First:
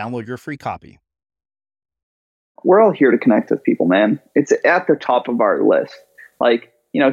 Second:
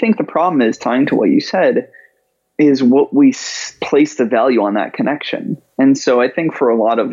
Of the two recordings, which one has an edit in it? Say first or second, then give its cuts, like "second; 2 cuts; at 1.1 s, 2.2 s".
first; 1 cut; at 2.6 s